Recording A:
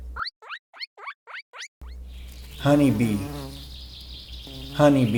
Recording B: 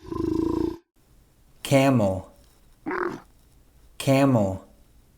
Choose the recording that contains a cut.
B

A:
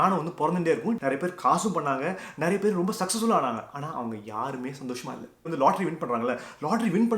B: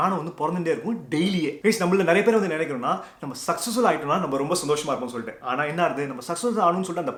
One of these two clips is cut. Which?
A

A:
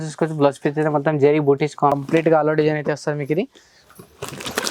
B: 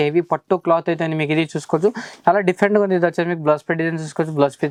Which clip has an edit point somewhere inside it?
A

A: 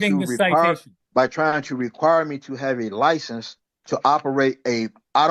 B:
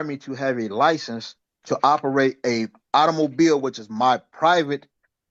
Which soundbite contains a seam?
A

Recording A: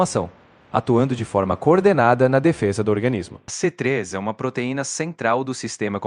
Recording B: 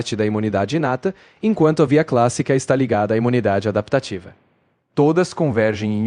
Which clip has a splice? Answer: A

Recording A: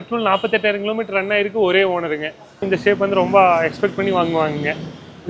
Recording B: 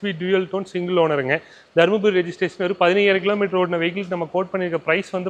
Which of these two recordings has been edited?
A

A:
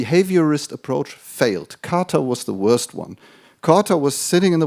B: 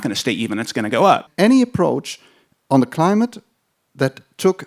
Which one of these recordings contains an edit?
B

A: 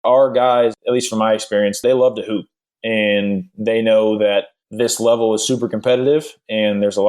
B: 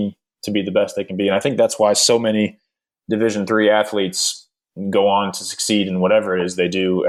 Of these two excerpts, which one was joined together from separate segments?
A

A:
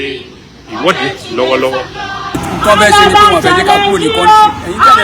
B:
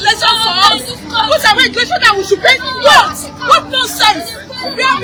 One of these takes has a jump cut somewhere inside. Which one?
A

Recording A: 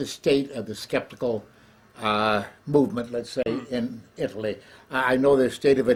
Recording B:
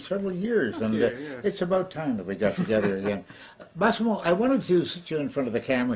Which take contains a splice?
B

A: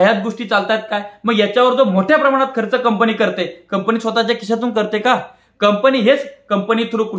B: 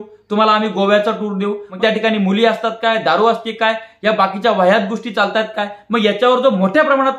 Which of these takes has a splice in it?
B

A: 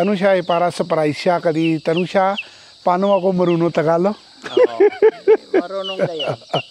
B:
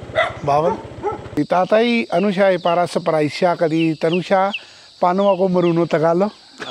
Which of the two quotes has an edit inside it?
B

